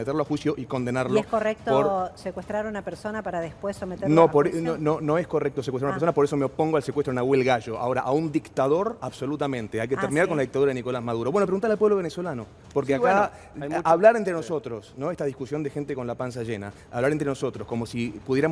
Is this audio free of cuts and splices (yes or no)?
yes